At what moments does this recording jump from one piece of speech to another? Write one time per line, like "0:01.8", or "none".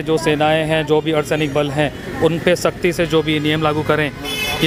none